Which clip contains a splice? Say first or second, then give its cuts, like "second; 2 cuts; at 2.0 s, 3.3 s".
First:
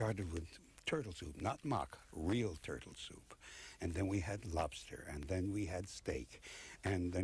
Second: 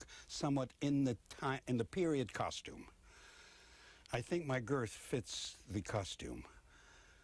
first; 1 cut; at 2.6 s